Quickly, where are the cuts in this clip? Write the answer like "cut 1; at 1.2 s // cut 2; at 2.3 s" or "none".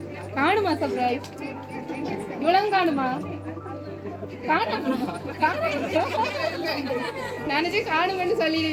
none